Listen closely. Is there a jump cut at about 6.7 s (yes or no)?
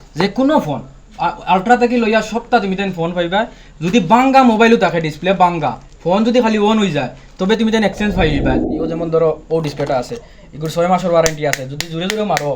no